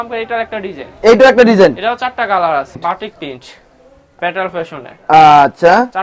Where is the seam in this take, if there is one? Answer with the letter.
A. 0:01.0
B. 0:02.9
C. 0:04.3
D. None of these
B